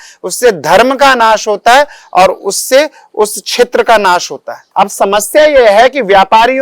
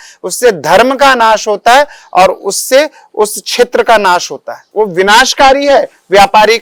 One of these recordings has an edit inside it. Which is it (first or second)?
first